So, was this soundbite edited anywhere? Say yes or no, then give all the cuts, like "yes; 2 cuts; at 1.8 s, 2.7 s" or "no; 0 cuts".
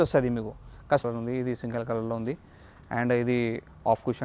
yes; 1 cut; at 1.0 s